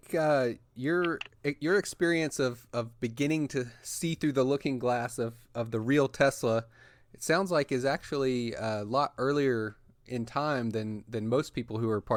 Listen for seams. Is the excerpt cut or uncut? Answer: uncut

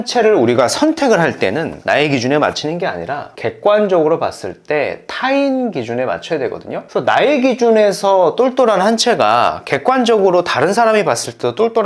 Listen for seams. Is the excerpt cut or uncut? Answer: cut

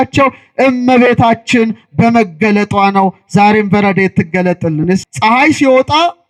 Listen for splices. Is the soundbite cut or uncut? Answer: cut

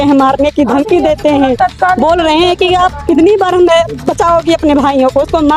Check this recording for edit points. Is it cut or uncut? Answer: uncut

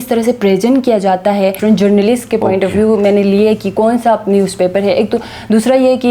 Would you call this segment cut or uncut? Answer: cut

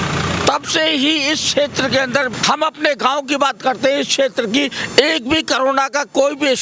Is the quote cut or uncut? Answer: cut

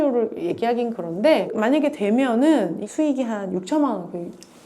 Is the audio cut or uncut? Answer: cut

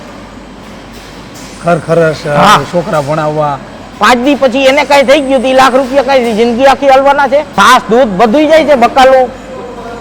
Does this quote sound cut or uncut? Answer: cut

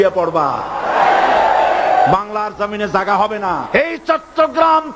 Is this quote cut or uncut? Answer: cut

